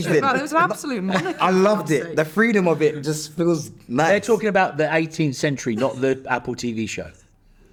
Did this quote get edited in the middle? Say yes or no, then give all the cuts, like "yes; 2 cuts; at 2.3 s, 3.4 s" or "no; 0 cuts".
no; 0 cuts